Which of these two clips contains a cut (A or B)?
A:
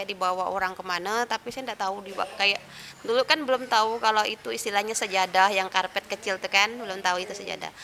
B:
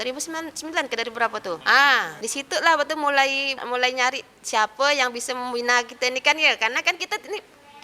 B